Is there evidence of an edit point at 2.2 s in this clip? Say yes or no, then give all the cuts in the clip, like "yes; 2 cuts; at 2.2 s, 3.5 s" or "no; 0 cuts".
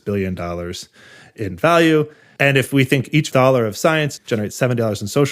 yes; 2 cuts; at 2.2 s, 4.2 s